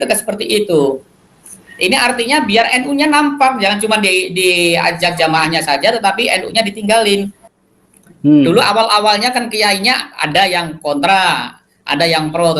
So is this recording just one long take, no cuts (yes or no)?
no